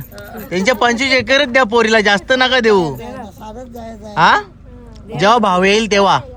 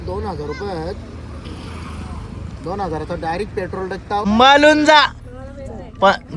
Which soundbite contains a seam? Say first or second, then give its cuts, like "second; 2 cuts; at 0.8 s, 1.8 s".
second; 1 cut; at 4.3 s